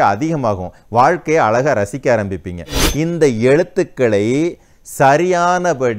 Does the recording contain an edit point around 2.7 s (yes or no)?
yes